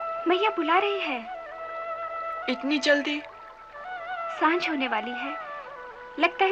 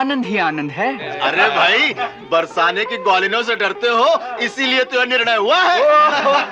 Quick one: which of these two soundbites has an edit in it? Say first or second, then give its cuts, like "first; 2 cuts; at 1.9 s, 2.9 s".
second; 1 cut; at 1.1 s